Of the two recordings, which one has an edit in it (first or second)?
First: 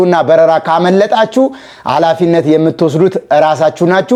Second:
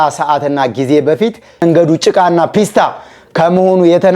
second